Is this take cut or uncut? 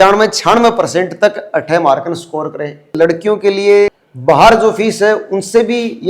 cut